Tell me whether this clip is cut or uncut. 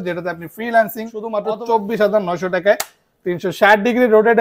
cut